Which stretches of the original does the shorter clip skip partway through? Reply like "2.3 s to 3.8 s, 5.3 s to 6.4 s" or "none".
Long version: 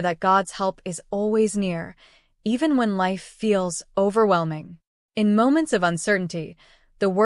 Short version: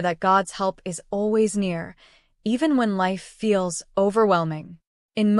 none